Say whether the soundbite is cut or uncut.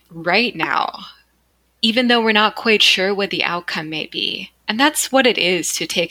uncut